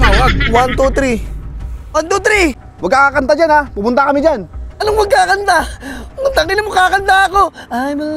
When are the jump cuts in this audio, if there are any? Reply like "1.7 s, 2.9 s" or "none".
2.0 s, 2.7 s